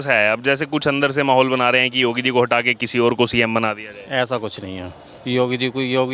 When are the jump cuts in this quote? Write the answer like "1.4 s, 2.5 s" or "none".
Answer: none